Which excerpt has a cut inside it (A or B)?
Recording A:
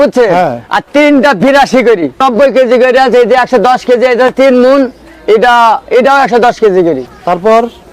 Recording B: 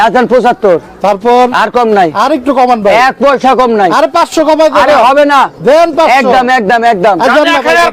A